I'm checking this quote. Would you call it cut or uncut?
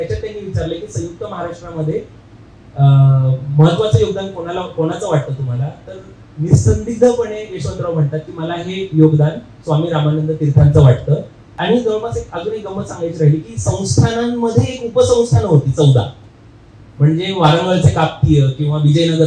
cut